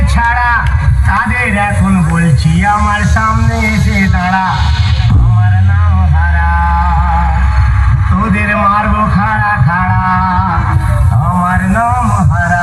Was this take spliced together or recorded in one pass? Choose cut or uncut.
uncut